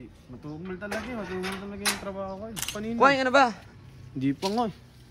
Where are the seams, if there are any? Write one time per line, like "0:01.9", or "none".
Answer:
0:02.7